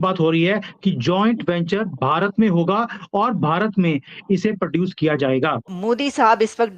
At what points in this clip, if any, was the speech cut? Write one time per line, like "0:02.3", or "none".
0:05.7